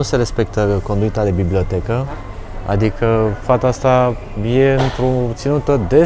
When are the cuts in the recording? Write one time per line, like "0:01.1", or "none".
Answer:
none